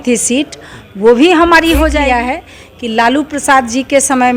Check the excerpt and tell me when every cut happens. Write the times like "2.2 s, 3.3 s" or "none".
2.0 s